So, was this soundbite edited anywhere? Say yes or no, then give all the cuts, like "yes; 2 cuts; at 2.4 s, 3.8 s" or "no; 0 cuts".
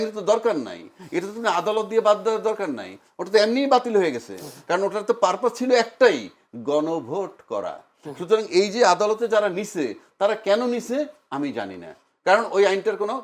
no; 0 cuts